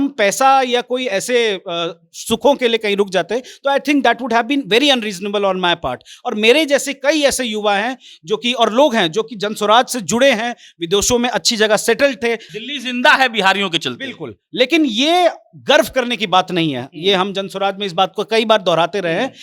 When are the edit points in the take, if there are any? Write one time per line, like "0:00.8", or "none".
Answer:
0:12.5